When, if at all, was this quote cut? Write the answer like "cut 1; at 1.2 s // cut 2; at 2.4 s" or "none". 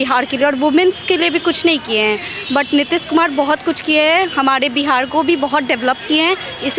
none